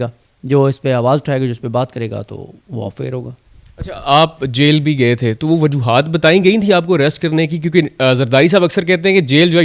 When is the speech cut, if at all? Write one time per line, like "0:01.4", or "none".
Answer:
none